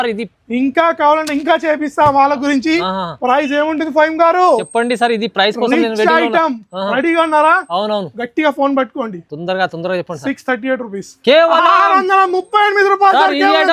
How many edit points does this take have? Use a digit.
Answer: 0